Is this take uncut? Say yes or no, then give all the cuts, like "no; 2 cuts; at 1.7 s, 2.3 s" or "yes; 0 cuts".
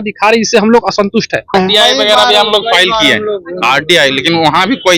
no; 1 cut; at 1.5 s